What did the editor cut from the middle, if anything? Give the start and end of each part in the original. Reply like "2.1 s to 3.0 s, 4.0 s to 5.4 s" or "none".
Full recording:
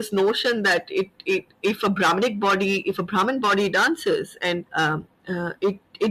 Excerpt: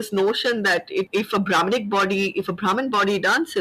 1.1 s to 1.6 s